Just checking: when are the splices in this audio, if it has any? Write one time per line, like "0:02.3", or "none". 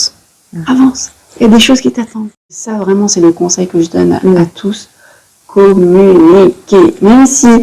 0:02.7